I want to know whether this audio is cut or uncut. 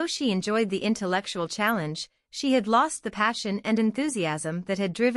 uncut